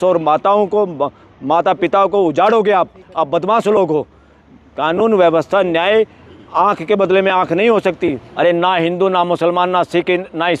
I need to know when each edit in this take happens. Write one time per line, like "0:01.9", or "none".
0:08.3